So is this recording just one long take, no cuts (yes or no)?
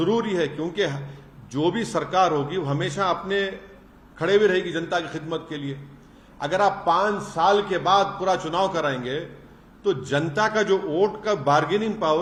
yes